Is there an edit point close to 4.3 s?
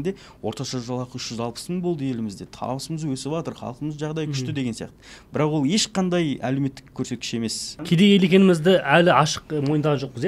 no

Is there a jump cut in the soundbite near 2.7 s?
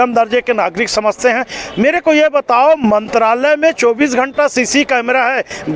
no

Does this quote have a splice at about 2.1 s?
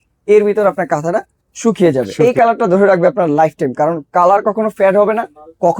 yes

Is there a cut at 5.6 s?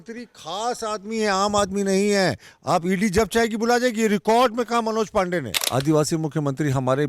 yes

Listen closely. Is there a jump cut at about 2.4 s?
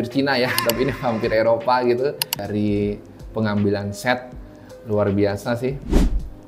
yes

